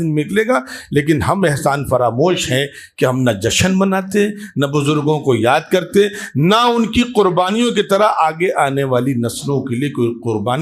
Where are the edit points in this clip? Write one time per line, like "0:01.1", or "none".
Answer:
none

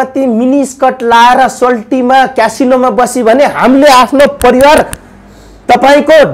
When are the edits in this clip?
none

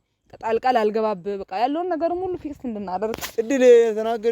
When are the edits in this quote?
0:03.2

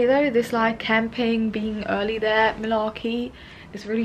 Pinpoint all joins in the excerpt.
none

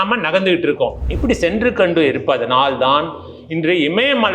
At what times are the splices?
0:01.0

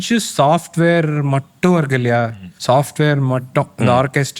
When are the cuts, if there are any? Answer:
0:02.3

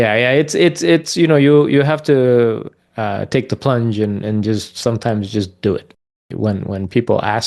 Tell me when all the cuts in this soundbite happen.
0:06.1

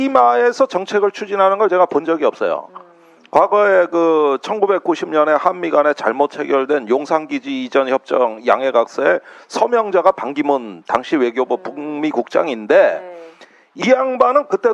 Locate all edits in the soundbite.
0:11.3

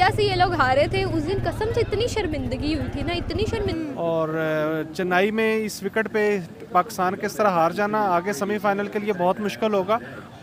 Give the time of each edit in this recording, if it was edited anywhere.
0:03.7

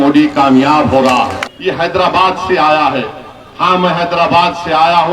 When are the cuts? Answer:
0:01.5

